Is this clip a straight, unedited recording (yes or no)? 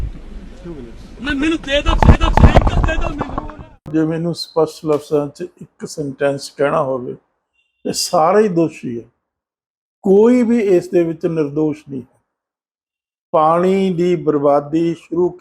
yes